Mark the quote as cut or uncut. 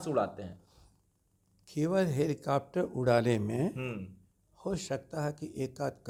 uncut